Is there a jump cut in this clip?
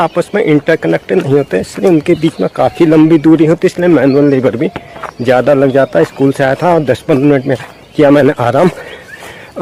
no; 0 cuts

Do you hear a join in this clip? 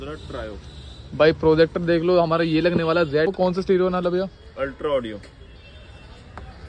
yes; 1 cut; at 3.3 s

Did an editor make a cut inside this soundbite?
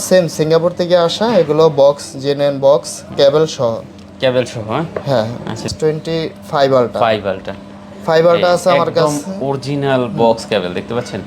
yes; 1 cut; at 5.7 s

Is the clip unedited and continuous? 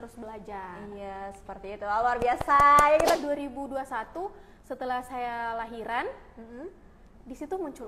no; 1 cut; at 3.2 s

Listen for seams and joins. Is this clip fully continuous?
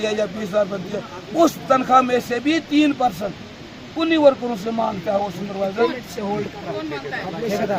yes; 0 cuts

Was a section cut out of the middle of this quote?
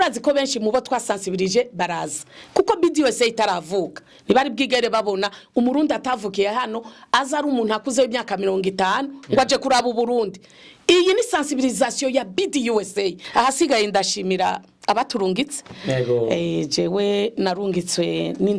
yes; 1 cut; at 13.2 s

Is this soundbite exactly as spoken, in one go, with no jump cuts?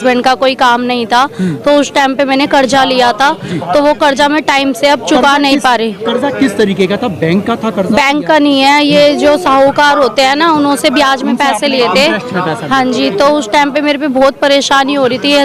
yes; 0 cuts

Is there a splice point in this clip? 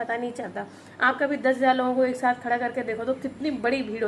no; 0 cuts

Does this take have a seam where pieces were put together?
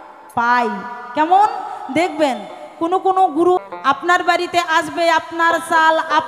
yes; 1 cut; at 3.6 s

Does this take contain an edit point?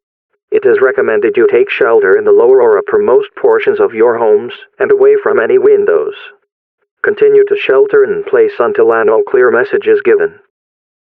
no; 0 cuts

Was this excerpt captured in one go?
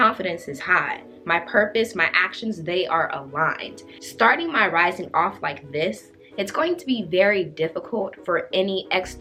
yes; 0 cuts

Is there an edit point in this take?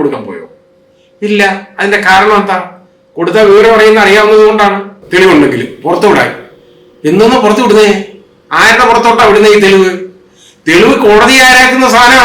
yes; 1 cut; at 5.0 s

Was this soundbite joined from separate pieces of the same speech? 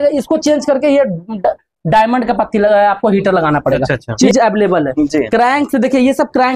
yes; 1 cut; at 4.2 s

